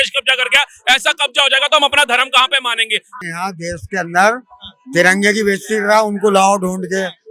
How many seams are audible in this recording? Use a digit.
1